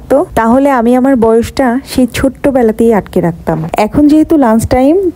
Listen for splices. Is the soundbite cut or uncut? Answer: uncut